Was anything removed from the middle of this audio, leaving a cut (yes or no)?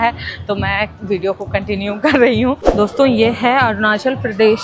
yes